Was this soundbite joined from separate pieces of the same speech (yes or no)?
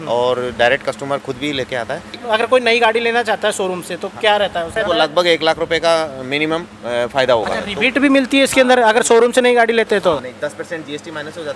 yes